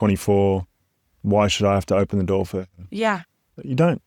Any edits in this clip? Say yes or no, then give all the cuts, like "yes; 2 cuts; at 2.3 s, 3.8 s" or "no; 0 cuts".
no; 0 cuts